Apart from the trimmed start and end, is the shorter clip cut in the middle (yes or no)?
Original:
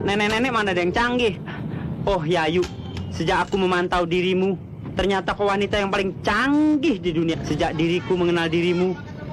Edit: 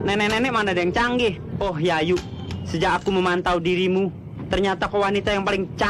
yes